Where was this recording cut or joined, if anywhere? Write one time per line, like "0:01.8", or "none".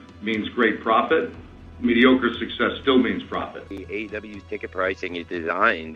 0:03.6